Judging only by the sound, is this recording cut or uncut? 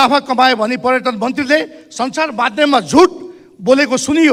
uncut